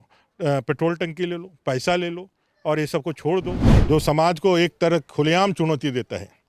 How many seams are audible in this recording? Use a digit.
1